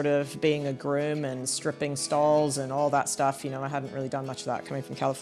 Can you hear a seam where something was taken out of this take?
no; 0 cuts

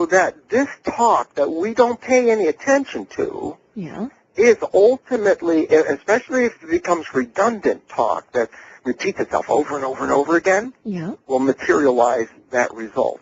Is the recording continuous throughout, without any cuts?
no; 1 cut; at 5.2 s

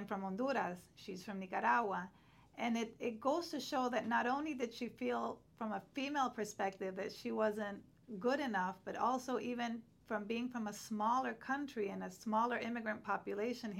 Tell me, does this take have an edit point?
no; 0 cuts

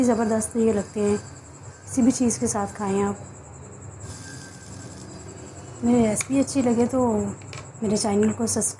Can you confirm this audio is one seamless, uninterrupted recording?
no; 1 cut; at 4.1 s

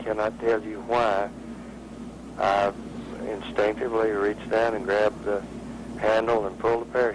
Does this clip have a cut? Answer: no; 0 cuts

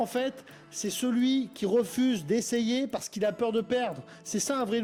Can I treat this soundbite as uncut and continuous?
yes; 0 cuts

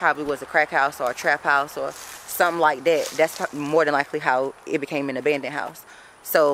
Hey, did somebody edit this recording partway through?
no; 0 cuts

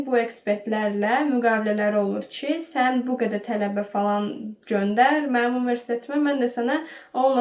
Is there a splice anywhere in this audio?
no; 0 cuts

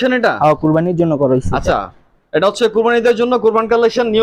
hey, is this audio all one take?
yes; 0 cuts

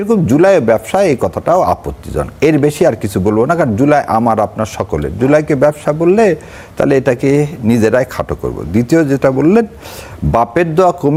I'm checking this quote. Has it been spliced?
no; 0 cuts

